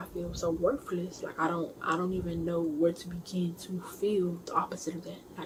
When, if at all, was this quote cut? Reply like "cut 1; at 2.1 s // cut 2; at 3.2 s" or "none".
none